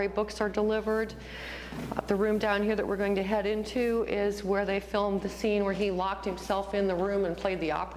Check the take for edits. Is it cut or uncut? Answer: uncut